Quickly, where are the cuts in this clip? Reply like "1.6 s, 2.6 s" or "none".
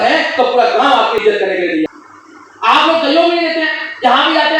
1.9 s